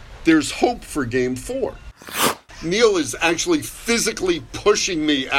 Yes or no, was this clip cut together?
yes